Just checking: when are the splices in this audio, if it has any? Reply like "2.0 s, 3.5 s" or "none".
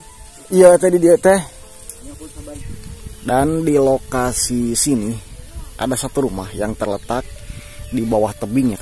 2.7 s